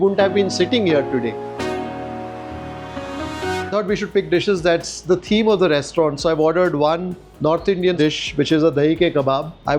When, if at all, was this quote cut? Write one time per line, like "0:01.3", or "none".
0:01.4